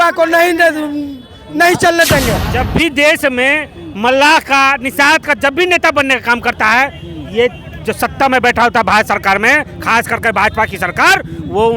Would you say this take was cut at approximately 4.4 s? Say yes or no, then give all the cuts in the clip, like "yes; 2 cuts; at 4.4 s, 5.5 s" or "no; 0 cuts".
no; 1 cut; at 2.5 s